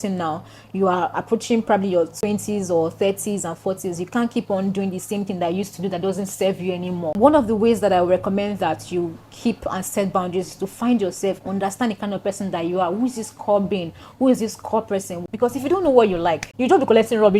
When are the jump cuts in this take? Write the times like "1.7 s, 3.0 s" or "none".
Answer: 2.1 s, 7.1 s, 15.2 s